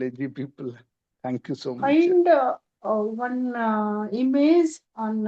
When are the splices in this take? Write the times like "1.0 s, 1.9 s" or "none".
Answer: 1.8 s